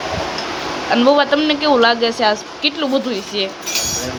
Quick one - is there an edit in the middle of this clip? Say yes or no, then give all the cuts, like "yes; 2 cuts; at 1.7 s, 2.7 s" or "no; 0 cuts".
no; 0 cuts